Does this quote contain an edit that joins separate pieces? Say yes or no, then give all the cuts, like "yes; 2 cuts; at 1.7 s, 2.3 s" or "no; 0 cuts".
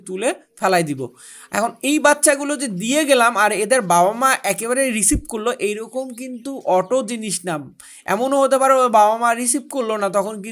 no; 0 cuts